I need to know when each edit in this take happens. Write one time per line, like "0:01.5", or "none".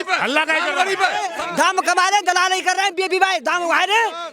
0:01.3